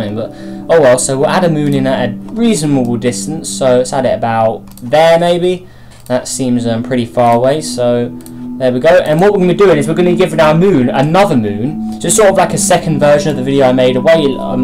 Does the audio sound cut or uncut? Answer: cut